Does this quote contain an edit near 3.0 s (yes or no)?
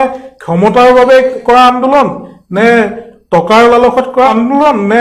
no